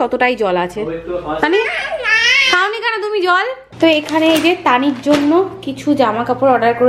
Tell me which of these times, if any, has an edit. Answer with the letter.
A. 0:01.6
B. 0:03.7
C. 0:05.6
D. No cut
B